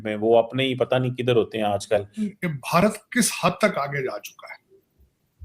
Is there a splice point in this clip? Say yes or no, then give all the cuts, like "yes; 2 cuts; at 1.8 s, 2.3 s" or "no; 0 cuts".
yes; 1 cut; at 2.3 s